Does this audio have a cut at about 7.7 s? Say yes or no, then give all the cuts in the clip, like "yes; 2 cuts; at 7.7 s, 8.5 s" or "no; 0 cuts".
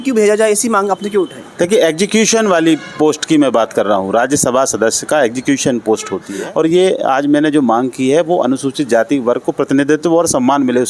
no; 1 cut; at 6.3 s